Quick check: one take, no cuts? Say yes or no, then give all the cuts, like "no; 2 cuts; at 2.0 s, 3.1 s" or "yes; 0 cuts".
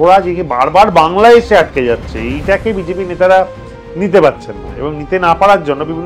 yes; 0 cuts